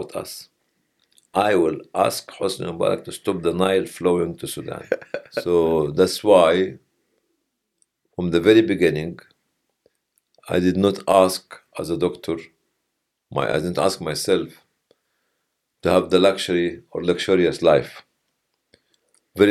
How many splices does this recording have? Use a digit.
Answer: 1